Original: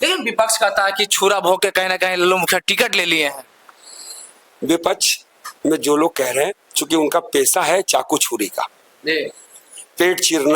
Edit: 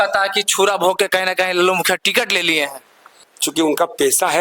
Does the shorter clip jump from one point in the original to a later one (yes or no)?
yes